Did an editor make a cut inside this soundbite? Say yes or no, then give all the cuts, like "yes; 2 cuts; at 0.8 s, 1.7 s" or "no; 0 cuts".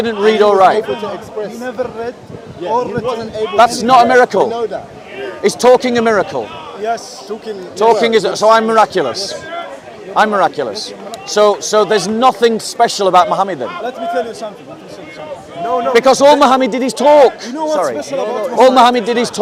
no; 0 cuts